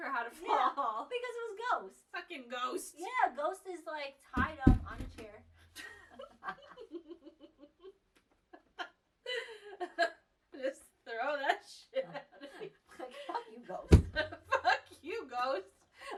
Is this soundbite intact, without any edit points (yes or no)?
yes